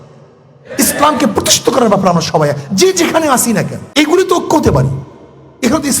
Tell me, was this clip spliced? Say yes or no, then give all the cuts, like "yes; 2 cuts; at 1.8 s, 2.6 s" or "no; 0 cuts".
yes; 1 cut; at 3.8 s